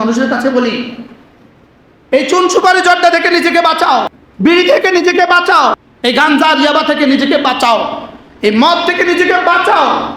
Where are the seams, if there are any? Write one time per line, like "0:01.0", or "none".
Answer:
0:04.2
0:05.9